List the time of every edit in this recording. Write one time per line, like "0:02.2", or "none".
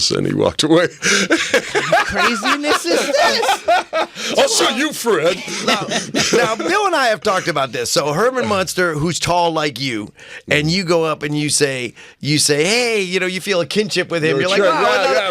none